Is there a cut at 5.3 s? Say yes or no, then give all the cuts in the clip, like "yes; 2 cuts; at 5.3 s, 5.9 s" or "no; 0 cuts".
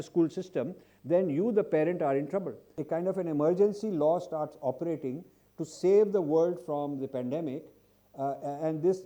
no; 1 cut; at 2.8 s